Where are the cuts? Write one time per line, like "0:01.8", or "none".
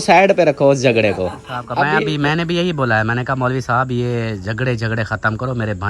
0:01.9